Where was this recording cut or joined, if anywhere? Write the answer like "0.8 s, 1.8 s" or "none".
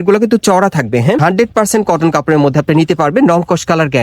1.2 s